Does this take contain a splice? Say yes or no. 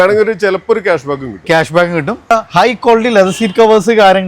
yes